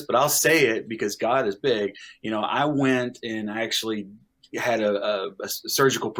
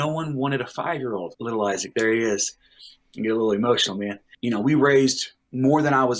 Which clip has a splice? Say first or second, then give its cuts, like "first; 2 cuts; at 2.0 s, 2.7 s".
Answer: second; 2 cuts; at 1.3 s, 4.2 s